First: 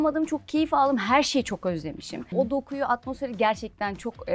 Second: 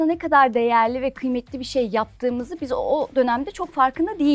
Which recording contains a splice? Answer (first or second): first